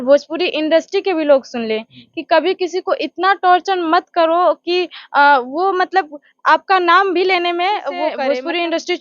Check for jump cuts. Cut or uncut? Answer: cut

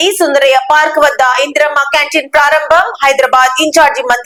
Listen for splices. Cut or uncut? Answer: uncut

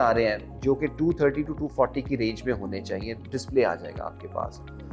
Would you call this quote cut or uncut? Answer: uncut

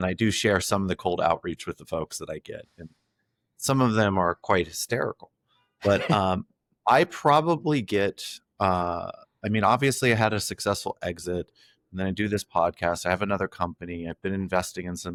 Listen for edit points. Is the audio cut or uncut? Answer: uncut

